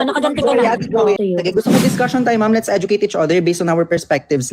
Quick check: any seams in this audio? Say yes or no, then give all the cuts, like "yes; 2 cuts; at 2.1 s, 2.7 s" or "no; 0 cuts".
yes; 1 cut; at 1.2 s